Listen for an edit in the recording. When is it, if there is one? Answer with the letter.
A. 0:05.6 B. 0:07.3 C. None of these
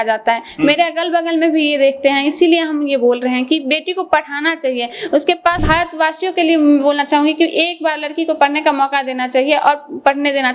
A